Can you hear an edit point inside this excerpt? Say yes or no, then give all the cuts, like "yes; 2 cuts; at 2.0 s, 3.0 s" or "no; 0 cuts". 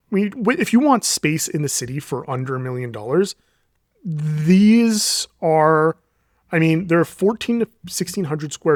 no; 0 cuts